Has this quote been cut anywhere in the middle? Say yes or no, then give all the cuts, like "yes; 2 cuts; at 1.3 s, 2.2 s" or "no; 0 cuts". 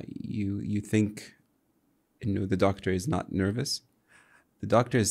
no; 0 cuts